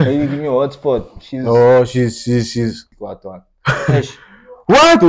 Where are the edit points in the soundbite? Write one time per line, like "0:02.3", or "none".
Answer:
0:02.9